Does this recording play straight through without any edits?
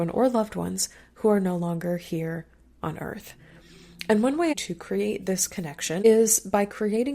no; 2 cuts; at 4.5 s, 6.0 s

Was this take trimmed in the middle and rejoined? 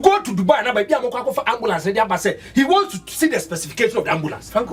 no; 0 cuts

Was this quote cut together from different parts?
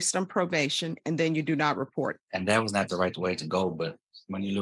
yes; 1 cut; at 2.2 s

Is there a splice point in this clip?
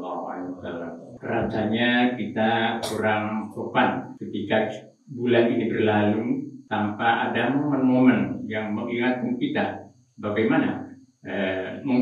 yes; 3 cuts; at 1.1 s, 4.2 s, 6.6 s

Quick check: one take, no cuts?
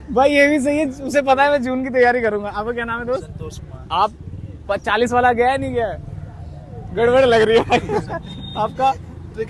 yes; 0 cuts

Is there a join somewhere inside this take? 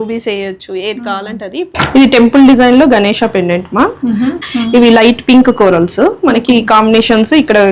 yes; 2 cuts; at 1.8 s, 4.4 s

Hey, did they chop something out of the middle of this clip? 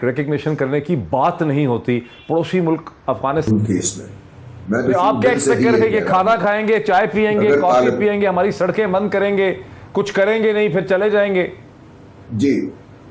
yes; 1 cut; at 3.5 s

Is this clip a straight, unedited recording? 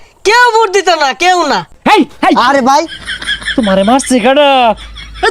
no; 1 cut; at 1.7 s

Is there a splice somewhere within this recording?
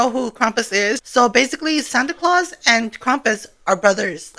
yes; 1 cut; at 1.0 s

